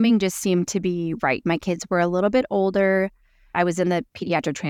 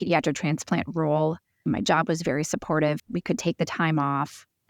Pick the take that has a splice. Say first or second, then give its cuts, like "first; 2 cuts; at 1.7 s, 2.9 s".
second; 2 cuts; at 1.6 s, 3.0 s